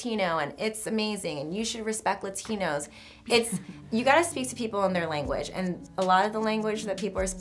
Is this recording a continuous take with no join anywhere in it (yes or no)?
yes